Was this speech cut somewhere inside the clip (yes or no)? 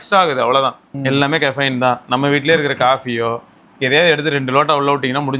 yes